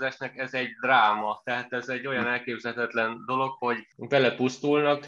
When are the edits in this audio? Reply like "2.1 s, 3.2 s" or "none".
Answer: 3.9 s